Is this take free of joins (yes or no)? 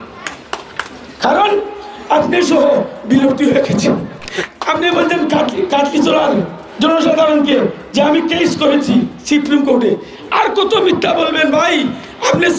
no